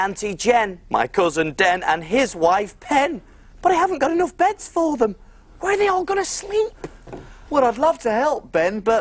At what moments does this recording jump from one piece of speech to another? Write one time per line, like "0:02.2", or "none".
0:04.1